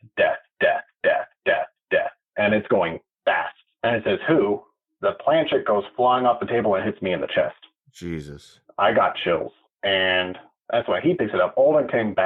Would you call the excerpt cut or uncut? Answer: uncut